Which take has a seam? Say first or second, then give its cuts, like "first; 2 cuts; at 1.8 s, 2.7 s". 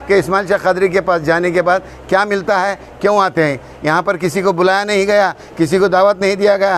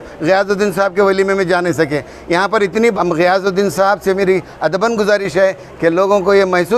second; 1 cut; at 3.0 s